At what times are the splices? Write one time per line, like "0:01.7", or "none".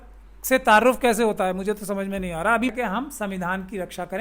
0:02.7